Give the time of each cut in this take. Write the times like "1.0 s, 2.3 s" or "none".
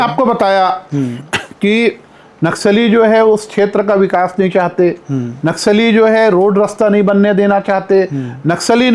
none